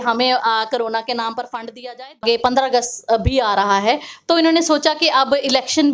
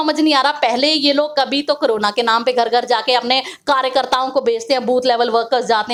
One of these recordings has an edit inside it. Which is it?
first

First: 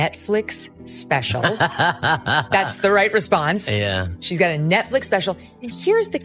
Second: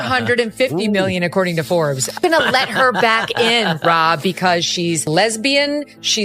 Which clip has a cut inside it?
second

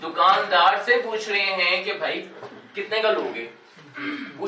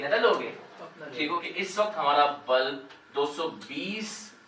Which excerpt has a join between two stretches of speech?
second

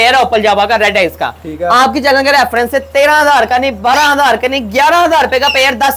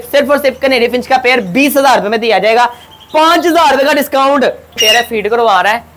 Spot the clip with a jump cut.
second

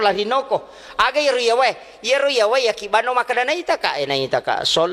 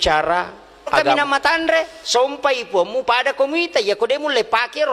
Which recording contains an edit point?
second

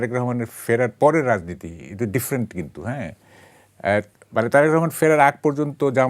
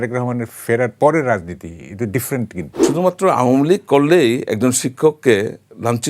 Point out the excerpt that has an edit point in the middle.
second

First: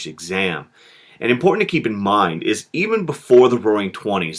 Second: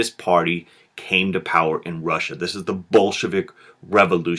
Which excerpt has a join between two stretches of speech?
second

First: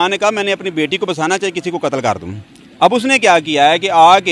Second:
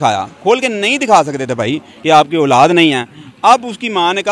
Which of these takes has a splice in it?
second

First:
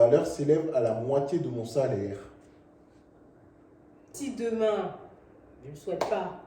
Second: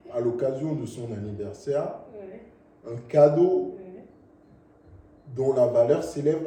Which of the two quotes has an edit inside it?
first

